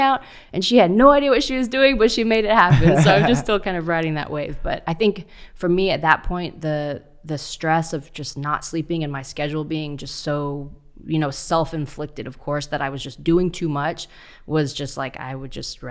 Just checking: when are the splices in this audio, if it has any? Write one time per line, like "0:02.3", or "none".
none